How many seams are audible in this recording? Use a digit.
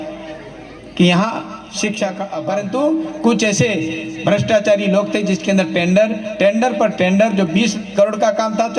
1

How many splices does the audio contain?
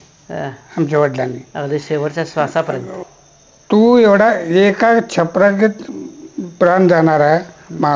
1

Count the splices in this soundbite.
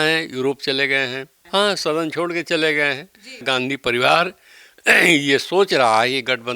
2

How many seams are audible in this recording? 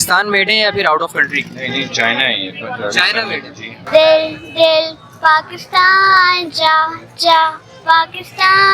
1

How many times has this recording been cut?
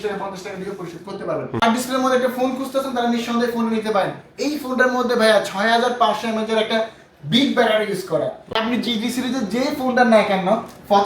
2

